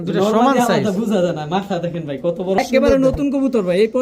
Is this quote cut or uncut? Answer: cut